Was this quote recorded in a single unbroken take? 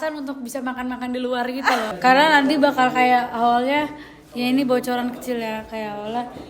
no; 1 cut; at 1.9 s

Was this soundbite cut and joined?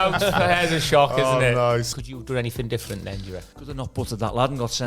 yes; 2 cuts; at 1.9 s, 3.6 s

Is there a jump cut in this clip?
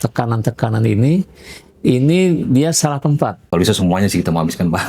yes; 1 cut; at 3.5 s

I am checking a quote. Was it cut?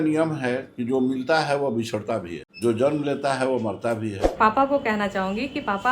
yes; 2 cuts; at 2.4 s, 4.2 s

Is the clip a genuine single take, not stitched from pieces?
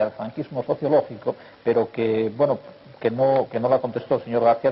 no; 1 cut; at 2.3 s

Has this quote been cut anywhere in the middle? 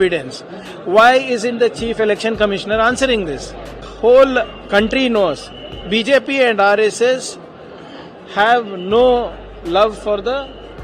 yes; 1 cut; at 3.8 s

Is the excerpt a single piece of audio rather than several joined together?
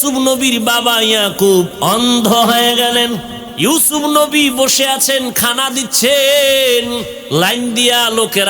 no; 2 cuts; at 3.4 s, 7.2 s

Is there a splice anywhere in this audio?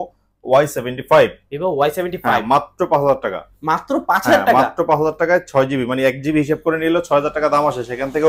no; 0 cuts

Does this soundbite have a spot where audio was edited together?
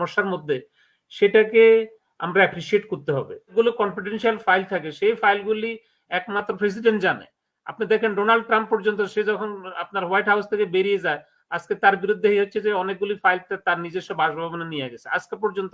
yes; 1 cut; at 3.5 s

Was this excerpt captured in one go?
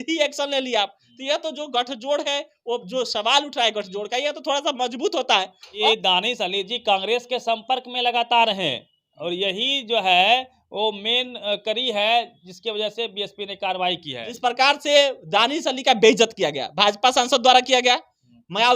no; 2 cuts; at 5.8 s, 14.2 s

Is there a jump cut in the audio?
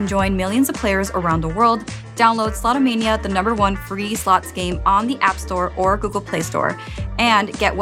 no; 0 cuts

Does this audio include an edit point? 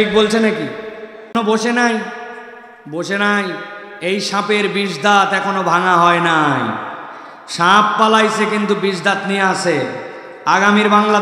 yes; 1 cut; at 1.3 s

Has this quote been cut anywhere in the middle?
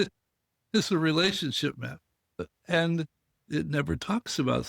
yes; 1 cut; at 2.4 s

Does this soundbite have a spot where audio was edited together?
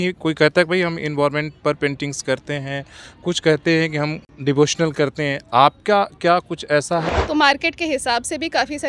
yes; 2 cuts; at 4.2 s, 7.1 s

